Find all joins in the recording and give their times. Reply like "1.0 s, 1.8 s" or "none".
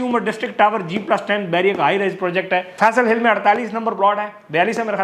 2.7 s